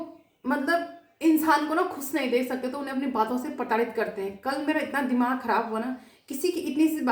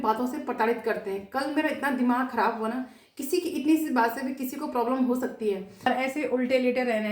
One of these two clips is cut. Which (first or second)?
second